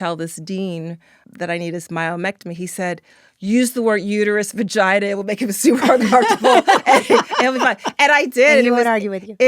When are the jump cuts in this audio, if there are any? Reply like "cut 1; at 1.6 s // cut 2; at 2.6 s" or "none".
cut 1; at 1.2 s